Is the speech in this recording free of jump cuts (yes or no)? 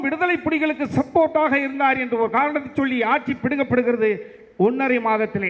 yes